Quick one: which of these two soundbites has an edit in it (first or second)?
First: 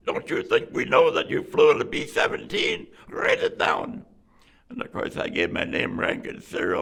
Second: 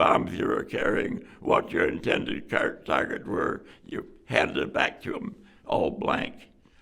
second